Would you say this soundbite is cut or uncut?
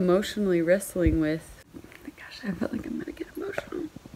cut